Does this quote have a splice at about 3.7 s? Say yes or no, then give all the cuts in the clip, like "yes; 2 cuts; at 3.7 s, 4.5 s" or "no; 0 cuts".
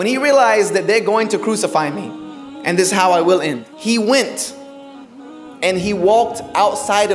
yes; 1 cut; at 3.7 s